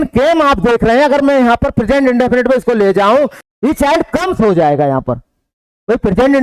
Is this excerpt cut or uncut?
cut